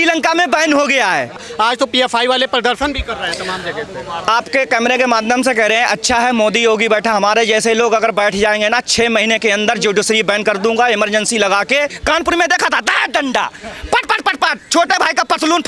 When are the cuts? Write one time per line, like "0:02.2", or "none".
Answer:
0:01.4
0:12.0

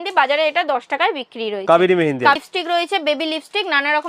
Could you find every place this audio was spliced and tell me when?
0:02.4

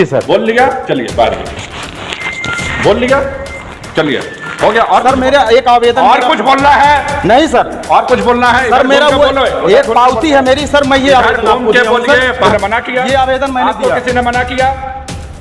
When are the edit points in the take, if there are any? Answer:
0:12.5

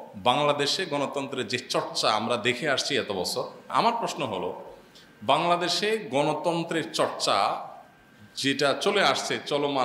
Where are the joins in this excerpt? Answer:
0:03.6

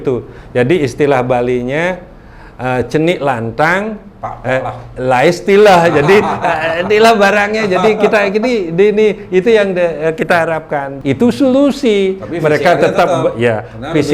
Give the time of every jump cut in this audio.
0:10.9

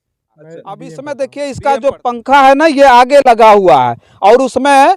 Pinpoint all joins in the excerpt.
0:00.9

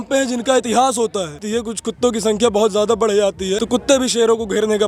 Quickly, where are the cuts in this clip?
0:01.4
0:03.6

